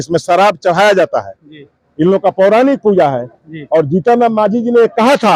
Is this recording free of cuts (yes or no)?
yes